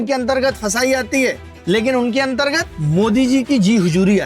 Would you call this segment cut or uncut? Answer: cut